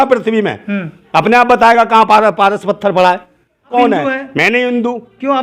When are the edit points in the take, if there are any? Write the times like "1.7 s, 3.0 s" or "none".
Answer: 3.7 s